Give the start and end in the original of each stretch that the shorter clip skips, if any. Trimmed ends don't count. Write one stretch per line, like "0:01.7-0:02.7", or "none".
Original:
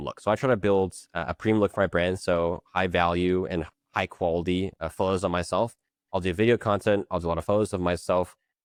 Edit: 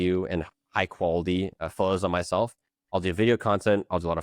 none